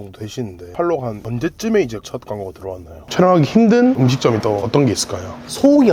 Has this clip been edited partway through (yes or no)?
yes